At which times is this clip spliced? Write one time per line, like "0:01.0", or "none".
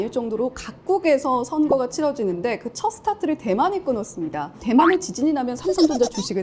0:04.6